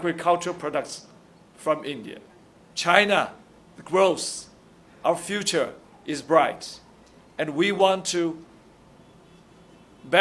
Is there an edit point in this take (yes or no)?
yes